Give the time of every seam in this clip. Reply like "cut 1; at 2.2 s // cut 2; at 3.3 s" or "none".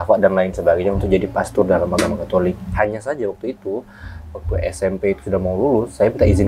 none